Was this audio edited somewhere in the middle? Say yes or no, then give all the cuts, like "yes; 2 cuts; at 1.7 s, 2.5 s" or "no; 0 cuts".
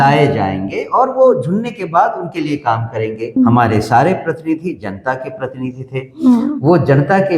yes; 1 cut; at 3.4 s